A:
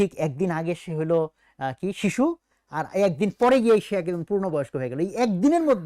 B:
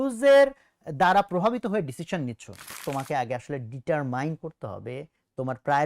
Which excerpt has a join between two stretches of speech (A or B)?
B